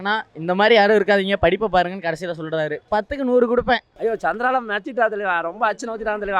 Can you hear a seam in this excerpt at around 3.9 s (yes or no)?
yes